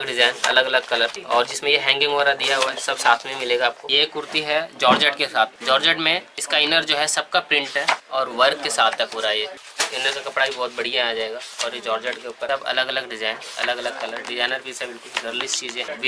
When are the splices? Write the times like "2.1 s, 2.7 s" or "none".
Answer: 3.8 s, 9.6 s, 12.5 s